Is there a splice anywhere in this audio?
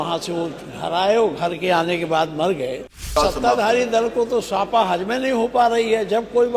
yes; 1 cut; at 3.1 s

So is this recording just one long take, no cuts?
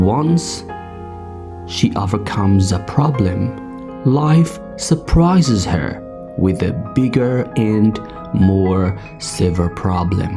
yes; 0 cuts

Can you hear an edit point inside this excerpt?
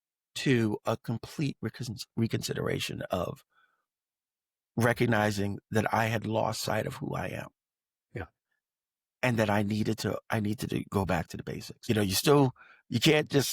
yes; 1 cut; at 11.9 s

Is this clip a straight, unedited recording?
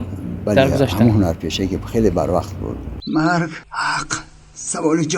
no; 1 cut; at 3.0 s

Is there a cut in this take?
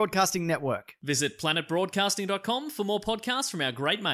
no; 0 cuts

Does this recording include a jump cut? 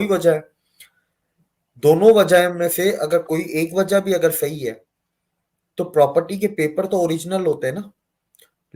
no; 0 cuts

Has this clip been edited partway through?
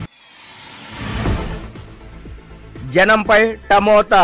yes; 2 cuts; at 1.8 s, 2.6 s

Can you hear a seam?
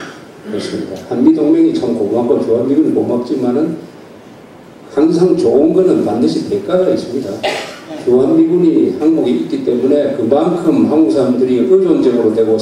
yes; 1 cut; at 11.7 s

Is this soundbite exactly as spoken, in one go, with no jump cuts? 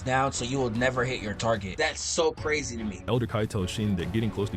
no; 2 cuts; at 1.7 s, 3.1 s

